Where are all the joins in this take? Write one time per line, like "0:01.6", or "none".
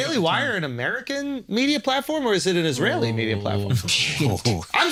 none